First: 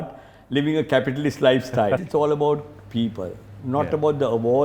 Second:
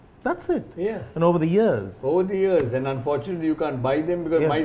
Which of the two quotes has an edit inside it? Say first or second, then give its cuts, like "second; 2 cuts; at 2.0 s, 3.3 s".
first; 1 cut; at 2.0 s